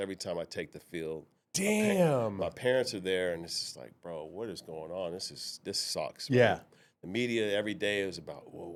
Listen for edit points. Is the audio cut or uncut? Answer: uncut